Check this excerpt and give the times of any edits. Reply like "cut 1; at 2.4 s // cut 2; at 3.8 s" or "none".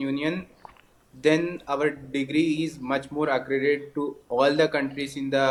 none